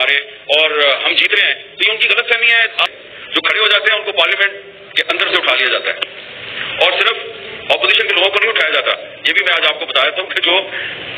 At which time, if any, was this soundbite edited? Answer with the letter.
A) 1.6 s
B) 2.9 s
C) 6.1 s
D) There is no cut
B